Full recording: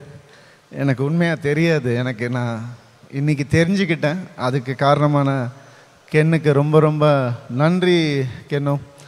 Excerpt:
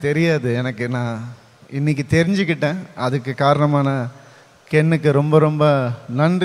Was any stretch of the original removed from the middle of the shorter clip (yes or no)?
no